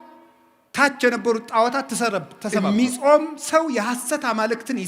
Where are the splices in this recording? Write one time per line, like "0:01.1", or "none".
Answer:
0:02.4